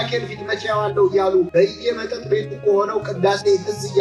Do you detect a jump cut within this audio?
yes; 1 cut; at 1.5 s

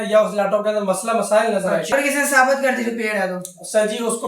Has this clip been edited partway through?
yes; 1 cut; at 1.9 s

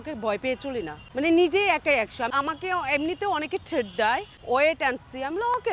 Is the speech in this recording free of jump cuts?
no; 3 cuts; at 1.0 s, 2.3 s, 4.3 s

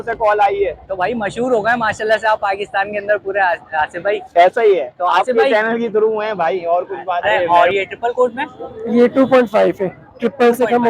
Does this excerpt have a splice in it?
yes; 1 cut; at 7.3 s

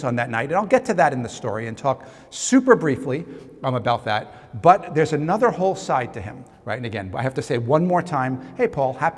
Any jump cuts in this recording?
no; 0 cuts

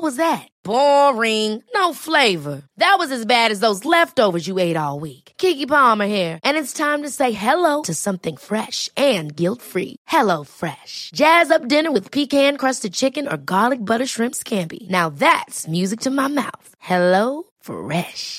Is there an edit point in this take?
no; 0 cuts

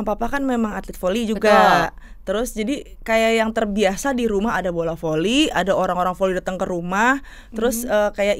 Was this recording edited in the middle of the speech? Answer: no; 0 cuts

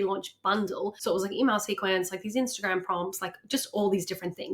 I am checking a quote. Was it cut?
yes; 1 cut; at 1.0 s

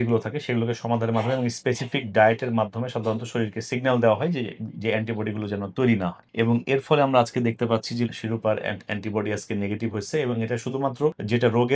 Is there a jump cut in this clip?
no; 0 cuts

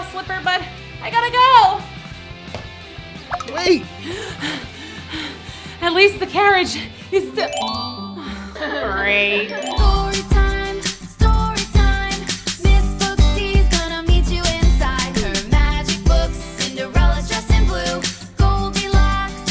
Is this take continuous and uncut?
no; 2 cuts; at 4.0 s, 9.8 s

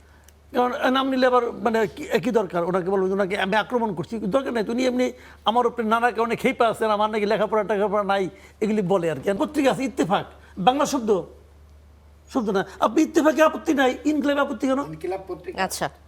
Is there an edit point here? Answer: yes; 1 cut; at 9.4 s

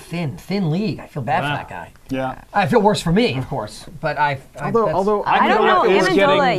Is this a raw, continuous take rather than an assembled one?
no; 1 cut; at 3.7 s

